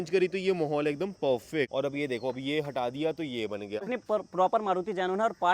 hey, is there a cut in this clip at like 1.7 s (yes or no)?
yes